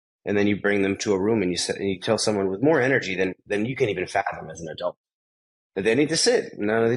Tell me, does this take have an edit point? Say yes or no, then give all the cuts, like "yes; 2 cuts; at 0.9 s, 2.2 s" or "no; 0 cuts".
no; 0 cuts